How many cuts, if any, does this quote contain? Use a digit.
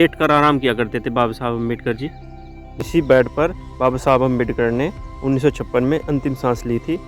1